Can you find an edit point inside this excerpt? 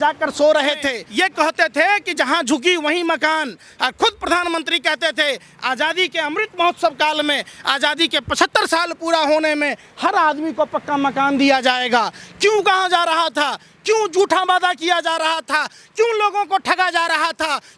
yes; 1 cut; at 1.0 s

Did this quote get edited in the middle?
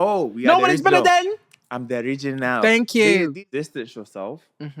yes; 1 cut; at 3.3 s

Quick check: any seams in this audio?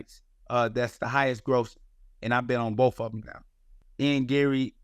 yes; 1 cut; at 3.8 s

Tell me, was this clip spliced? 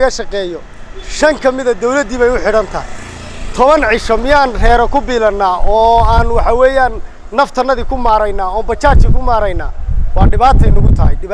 no; 0 cuts

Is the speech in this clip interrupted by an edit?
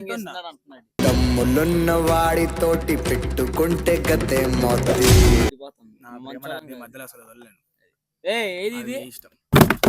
yes; 1 cut; at 5.5 s

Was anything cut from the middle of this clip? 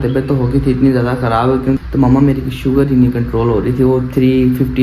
yes; 1 cut; at 1.8 s

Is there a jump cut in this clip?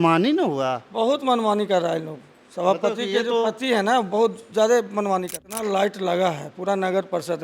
yes; 1 cut; at 5.4 s

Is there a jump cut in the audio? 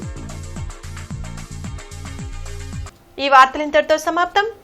no; 0 cuts

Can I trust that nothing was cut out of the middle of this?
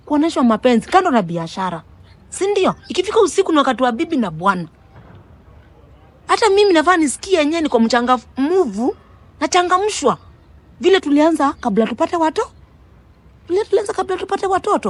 yes; 0 cuts

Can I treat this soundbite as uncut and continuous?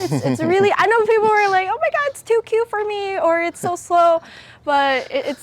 yes; 0 cuts

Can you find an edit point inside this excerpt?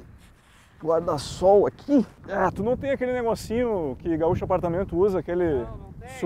yes; 1 cut; at 2.2 s

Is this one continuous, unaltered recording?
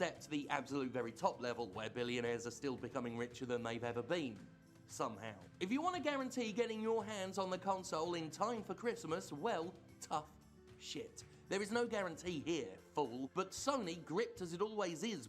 yes; 0 cuts

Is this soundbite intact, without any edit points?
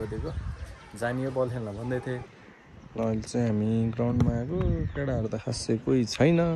no; 1 cut; at 2.2 s

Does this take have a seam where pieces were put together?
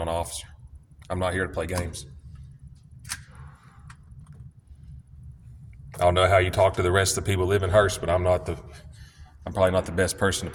no; 0 cuts

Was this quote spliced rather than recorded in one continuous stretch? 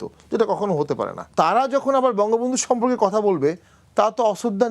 yes; 1 cut; at 1.3 s

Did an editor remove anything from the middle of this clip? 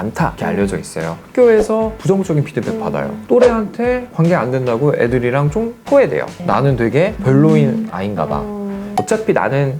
yes; 3 cuts; at 1.2 s, 6.4 s, 8.9 s

